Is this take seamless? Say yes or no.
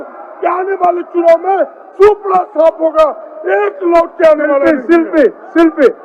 yes